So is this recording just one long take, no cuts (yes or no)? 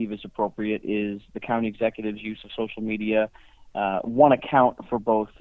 yes